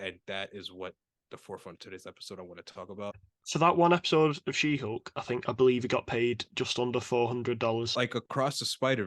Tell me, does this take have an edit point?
yes; 2 cuts; at 3.3 s, 7.9 s

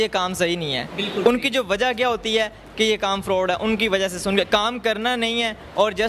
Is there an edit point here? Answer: no; 0 cuts

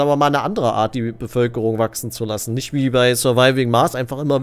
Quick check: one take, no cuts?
yes; 0 cuts

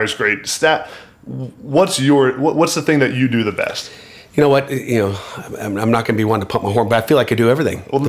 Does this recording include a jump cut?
no; 0 cuts

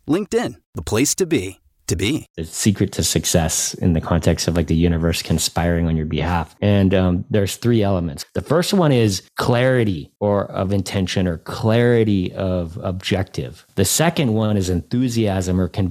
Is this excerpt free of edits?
no; 5 cuts; at 2.3 s, 6.5 s, 9.3 s, 10.1 s, 13.6 s

